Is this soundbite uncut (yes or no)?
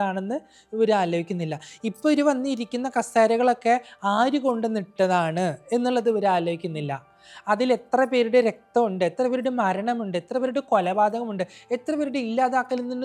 yes